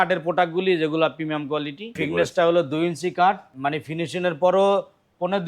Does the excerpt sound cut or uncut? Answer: cut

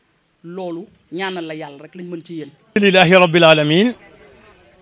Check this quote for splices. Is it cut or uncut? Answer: uncut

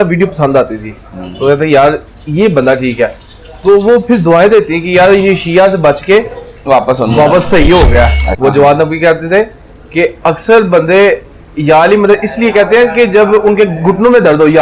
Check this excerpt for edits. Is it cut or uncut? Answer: cut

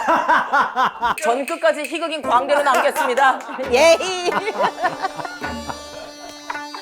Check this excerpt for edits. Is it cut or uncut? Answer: cut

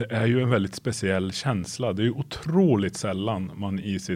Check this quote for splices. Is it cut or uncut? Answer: uncut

